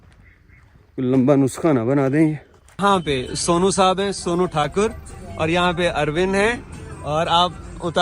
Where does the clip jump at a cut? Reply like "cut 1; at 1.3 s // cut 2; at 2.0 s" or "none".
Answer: cut 1; at 2.7 s